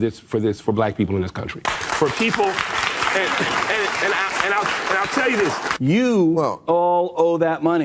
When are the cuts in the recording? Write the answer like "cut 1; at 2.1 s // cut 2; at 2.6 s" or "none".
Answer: cut 1; at 5.7 s